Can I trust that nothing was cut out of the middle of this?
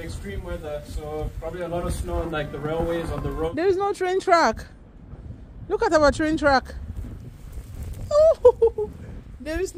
no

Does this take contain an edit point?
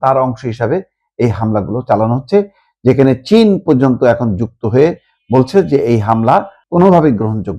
yes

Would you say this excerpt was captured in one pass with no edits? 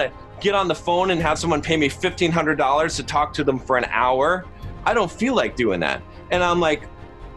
yes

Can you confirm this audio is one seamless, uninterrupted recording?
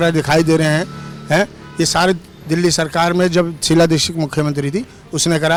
yes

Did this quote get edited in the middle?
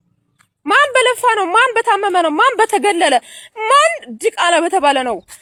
no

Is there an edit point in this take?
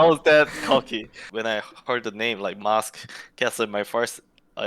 yes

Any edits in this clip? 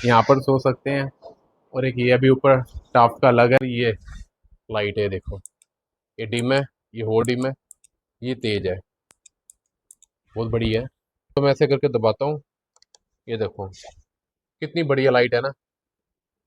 yes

